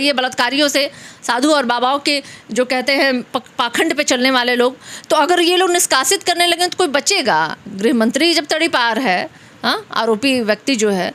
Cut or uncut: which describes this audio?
uncut